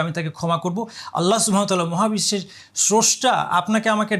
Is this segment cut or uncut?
uncut